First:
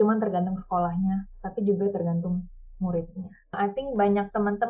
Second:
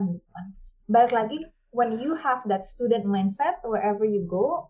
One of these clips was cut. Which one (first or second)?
first